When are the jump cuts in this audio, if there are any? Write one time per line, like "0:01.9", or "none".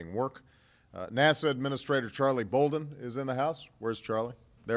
none